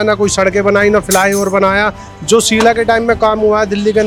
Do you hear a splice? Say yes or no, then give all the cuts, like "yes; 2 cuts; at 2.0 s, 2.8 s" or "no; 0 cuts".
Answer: no; 0 cuts